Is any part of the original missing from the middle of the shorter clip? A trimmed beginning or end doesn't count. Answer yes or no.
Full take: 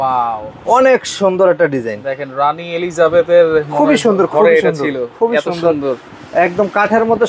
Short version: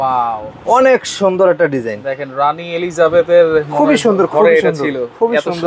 no